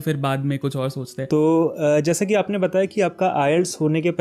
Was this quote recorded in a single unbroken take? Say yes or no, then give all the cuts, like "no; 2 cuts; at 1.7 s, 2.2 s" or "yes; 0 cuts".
no; 1 cut; at 1.3 s